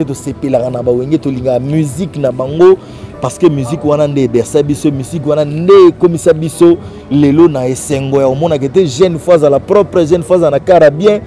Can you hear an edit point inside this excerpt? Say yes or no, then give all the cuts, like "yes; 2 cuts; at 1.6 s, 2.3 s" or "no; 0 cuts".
no; 0 cuts